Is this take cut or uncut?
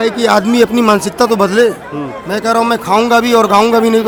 uncut